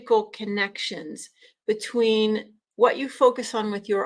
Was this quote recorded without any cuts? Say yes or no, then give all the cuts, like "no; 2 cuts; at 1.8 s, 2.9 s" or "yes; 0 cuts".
yes; 0 cuts